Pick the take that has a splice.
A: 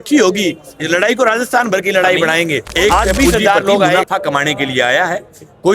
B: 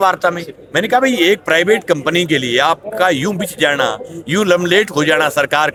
A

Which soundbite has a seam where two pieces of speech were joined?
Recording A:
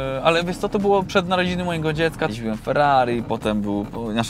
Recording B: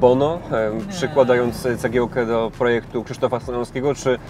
A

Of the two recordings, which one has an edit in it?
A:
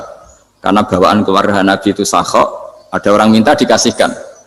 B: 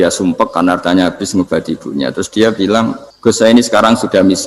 B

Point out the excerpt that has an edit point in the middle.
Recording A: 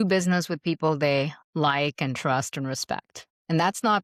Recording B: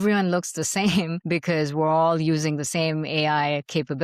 B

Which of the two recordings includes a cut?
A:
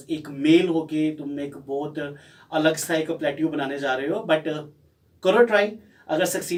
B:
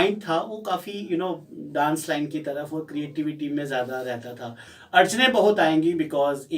B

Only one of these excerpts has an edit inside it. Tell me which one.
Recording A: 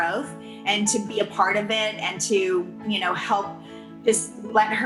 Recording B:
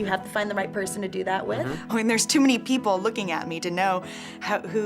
B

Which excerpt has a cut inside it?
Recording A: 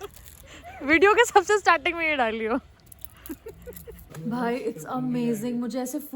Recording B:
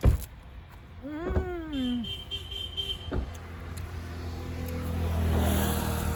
A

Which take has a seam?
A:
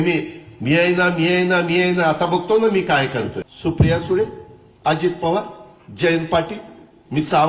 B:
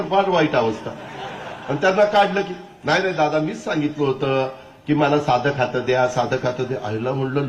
A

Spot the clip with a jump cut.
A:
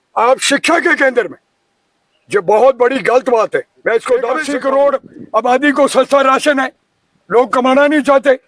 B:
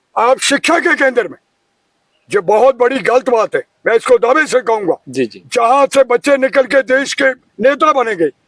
A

